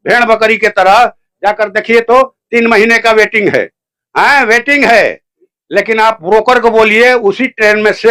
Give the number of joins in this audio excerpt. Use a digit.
0